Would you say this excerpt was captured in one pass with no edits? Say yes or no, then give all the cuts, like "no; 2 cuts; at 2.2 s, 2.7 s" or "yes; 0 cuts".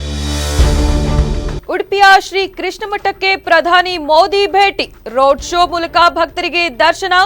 no; 1 cut; at 1.6 s